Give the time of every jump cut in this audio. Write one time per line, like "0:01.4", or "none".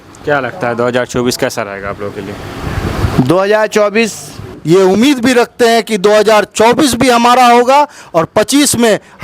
0:04.5